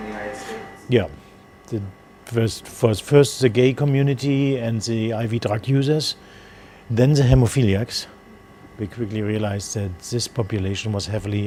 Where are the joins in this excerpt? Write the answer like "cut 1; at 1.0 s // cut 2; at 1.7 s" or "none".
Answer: none